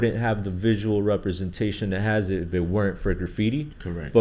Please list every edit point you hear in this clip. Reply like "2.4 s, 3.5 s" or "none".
none